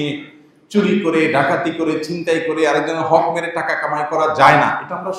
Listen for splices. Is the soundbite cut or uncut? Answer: uncut